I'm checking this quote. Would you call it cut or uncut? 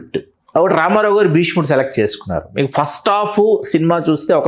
uncut